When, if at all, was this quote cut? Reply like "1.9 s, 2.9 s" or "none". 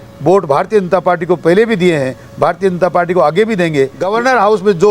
4.0 s